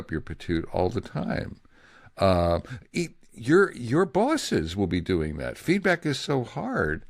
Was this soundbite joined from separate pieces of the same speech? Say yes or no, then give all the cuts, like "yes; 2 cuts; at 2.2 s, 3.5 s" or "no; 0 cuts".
no; 0 cuts